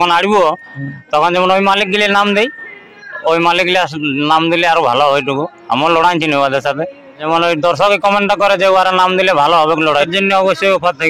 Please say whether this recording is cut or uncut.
cut